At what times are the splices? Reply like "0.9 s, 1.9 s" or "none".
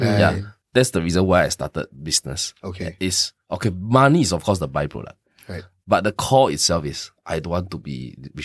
none